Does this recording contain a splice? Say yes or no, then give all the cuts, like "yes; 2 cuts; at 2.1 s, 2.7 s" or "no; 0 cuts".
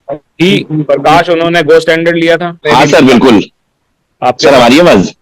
yes; 1 cut; at 2.5 s